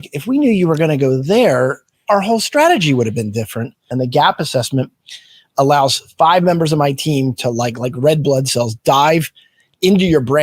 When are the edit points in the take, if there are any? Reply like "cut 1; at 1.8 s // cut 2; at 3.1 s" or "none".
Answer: cut 1; at 3.8 s